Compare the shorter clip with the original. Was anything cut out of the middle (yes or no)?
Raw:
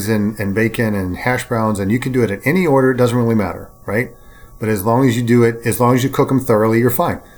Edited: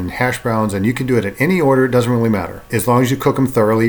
yes